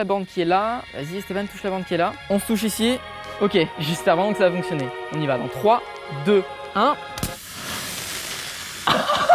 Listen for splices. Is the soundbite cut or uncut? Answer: cut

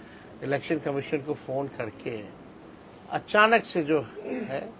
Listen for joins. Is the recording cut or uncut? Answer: uncut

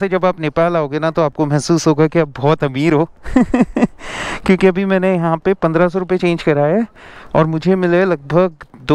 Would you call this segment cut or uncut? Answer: uncut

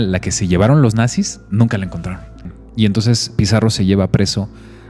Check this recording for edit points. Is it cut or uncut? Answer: cut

